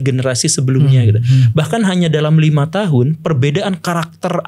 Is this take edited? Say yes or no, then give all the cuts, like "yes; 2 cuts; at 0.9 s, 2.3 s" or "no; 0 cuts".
no; 0 cuts